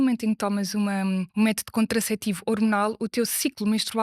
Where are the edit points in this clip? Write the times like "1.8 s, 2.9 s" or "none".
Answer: 1.3 s

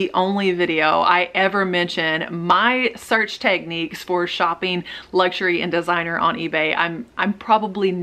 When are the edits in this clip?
none

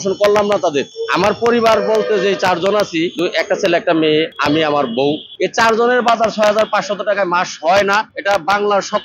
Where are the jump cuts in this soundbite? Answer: 1.0 s, 3.1 s, 4.3 s, 5.3 s, 8.1 s

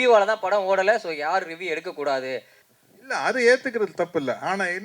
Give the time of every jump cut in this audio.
2.6 s

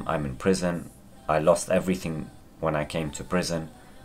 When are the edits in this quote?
none

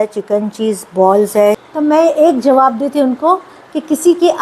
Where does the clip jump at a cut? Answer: 1.6 s

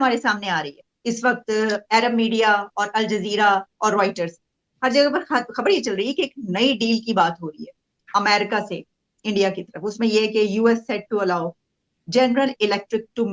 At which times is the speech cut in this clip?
0.9 s

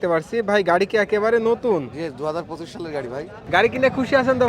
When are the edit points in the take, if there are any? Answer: 3.4 s

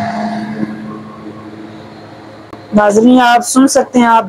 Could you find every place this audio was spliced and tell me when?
none

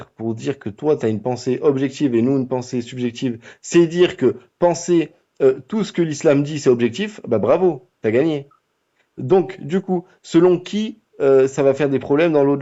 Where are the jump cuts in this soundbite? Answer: none

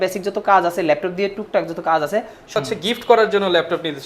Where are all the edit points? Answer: 2.6 s

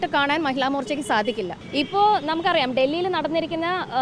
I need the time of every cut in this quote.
1.6 s

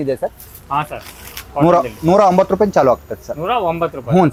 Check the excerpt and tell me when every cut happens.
none

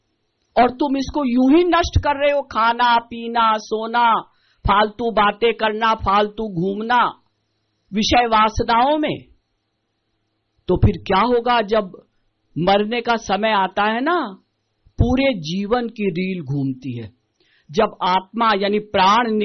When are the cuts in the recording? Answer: none

